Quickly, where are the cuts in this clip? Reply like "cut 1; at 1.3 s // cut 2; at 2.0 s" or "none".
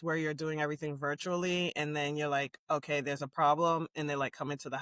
none